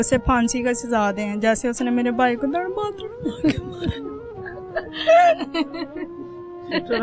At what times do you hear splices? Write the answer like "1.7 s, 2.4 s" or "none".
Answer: none

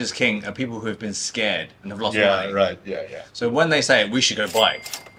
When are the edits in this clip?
none

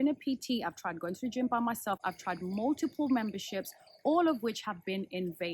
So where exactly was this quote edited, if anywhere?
none

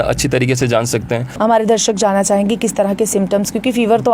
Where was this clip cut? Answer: 1.3 s

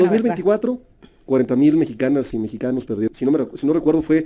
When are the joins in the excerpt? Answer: 3.1 s

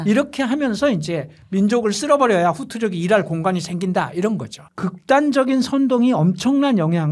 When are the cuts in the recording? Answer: 4.6 s

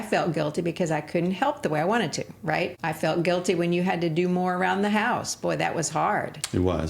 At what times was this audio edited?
2.8 s

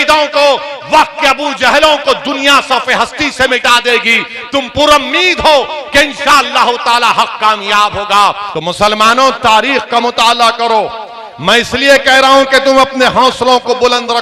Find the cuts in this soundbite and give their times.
8.5 s

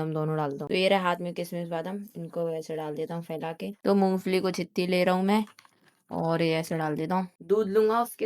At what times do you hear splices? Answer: 3.8 s, 7.4 s

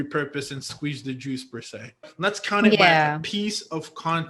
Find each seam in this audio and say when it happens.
2.1 s

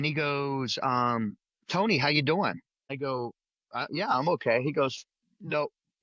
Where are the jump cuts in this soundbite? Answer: 2.7 s

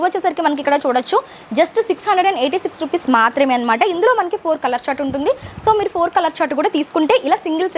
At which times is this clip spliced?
none

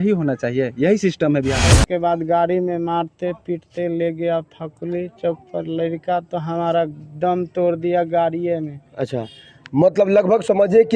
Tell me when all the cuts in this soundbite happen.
1.7 s

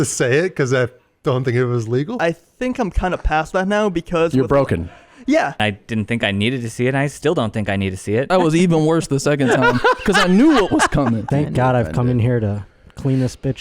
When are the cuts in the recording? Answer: 2.2 s, 5.6 s, 8.3 s, 11.3 s

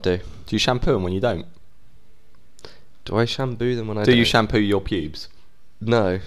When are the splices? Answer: none

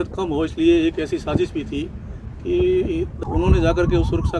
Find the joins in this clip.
3.1 s

